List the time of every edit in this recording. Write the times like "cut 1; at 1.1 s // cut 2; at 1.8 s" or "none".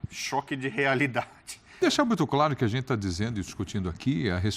cut 1; at 1.8 s